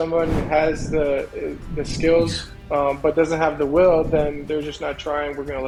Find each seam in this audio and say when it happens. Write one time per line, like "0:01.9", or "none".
none

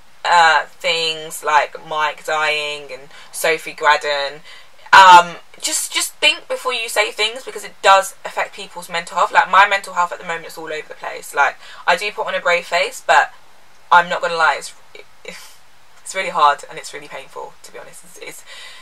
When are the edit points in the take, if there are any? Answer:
none

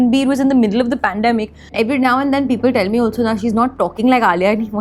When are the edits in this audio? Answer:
0:01.6

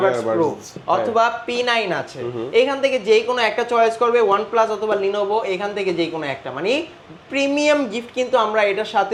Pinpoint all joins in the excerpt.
none

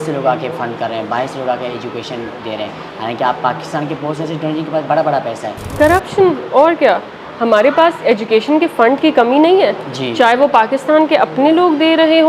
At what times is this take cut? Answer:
0:05.6

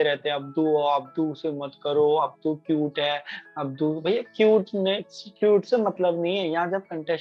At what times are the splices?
none

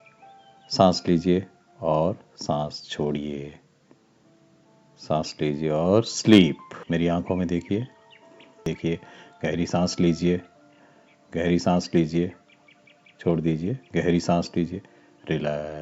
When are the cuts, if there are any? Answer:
0:06.7
0:08.6

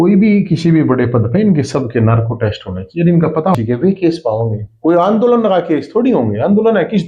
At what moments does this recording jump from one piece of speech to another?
0:03.5

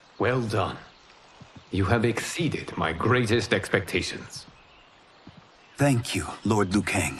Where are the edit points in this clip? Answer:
none

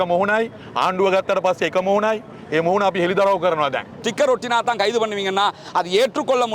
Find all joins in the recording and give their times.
0:04.0

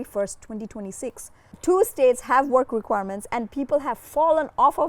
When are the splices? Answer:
0:01.5

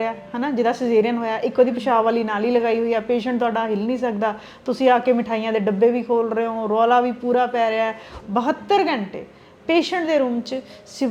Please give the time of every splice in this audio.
0:08.1

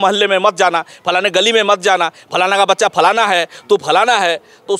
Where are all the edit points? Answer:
none

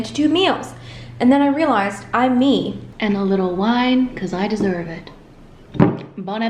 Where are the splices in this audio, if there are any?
0:02.8
0:05.6

